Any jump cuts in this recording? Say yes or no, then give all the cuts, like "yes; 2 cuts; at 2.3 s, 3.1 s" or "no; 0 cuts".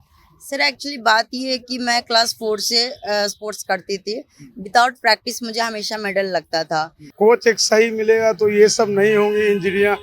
yes; 1 cut; at 7.0 s